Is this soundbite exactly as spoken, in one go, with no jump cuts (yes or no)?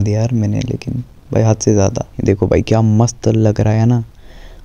no